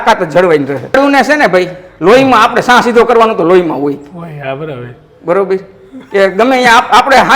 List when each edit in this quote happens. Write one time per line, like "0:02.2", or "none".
0:01.0